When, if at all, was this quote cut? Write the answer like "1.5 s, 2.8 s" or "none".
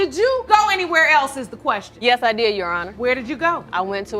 1.9 s, 2.9 s

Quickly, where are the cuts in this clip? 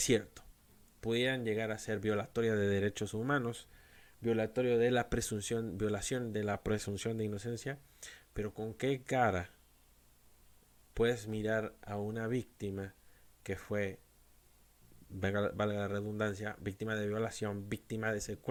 none

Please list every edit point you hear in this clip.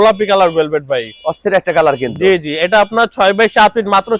none

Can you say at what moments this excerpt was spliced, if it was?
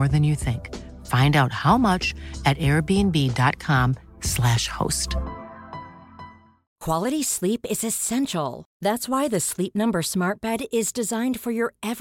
6.7 s

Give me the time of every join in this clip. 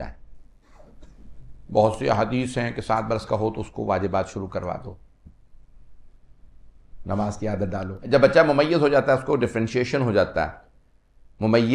1.0 s, 8.0 s

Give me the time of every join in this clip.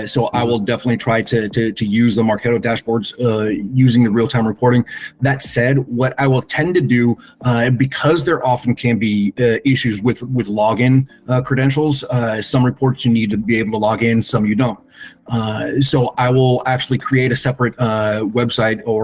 none

